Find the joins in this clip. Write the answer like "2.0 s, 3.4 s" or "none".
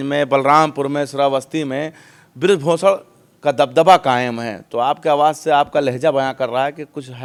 none